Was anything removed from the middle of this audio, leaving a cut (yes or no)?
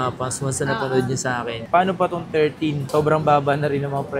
yes